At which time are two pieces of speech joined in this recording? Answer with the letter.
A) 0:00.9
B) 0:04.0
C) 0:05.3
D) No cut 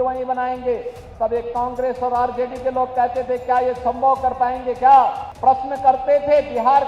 C